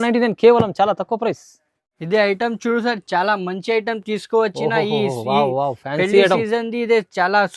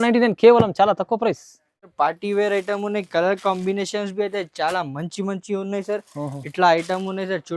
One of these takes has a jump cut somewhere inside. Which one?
second; 1 cut; at 1.9 s

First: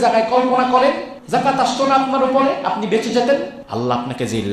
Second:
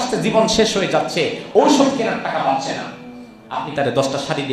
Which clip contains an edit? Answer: first; 2 cuts; at 1.1 s, 3.6 s

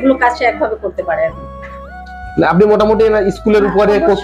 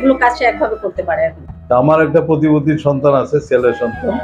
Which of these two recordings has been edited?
second; 1 cut; at 1.5 s

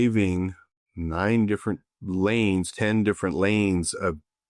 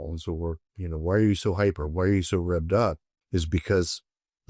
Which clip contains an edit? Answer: second; 1 cut; at 3.1 s

